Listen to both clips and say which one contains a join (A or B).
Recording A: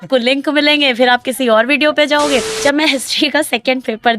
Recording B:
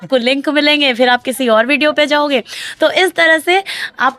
A